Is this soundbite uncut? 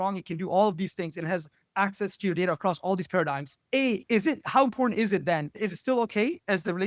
no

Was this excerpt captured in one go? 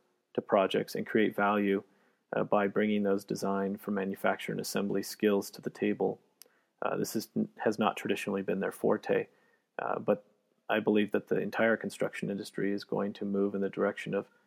yes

